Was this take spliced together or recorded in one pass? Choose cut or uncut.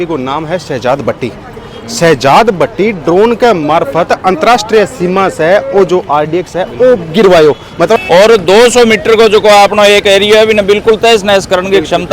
cut